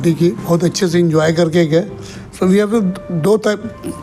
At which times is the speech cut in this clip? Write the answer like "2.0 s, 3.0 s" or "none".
none